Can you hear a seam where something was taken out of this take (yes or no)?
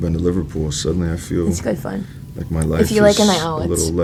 no